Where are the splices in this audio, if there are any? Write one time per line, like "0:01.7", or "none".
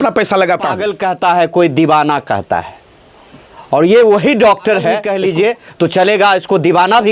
0:00.9
0:05.1